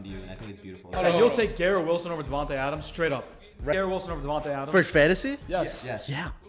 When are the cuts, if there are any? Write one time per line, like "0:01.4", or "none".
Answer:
0:00.9
0:03.7